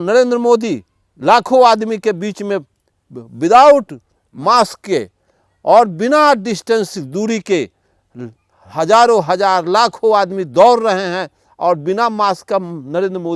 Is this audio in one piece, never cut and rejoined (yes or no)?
yes